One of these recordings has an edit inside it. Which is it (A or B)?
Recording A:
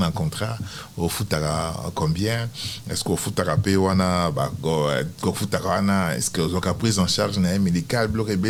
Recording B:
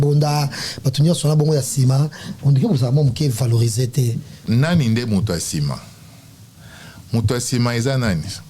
B